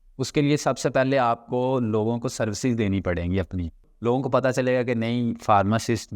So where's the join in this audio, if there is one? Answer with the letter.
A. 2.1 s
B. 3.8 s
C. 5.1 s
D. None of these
B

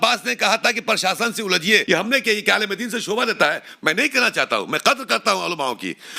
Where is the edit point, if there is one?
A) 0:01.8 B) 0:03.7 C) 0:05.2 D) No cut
A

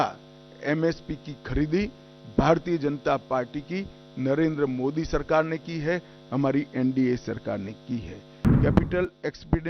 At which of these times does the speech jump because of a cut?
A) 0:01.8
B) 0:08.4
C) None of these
B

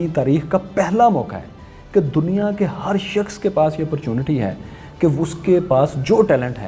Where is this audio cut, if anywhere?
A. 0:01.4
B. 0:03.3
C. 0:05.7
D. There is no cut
D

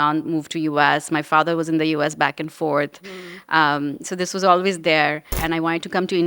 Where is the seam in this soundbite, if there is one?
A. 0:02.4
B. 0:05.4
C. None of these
B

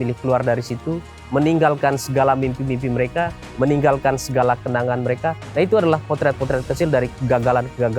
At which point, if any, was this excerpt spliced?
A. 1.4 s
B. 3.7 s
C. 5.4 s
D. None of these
C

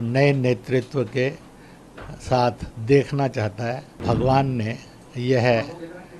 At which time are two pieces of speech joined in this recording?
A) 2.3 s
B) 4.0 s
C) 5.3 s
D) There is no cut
B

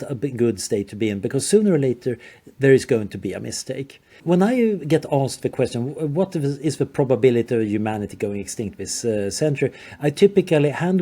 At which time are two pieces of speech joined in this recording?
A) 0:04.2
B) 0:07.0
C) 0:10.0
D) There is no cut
A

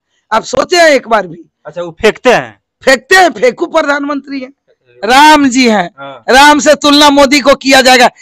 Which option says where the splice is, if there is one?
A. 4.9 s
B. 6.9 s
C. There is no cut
A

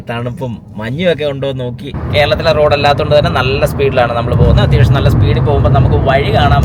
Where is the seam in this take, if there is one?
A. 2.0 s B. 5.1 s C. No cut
A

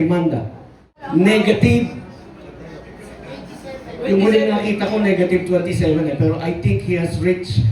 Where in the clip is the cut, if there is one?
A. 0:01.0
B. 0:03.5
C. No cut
A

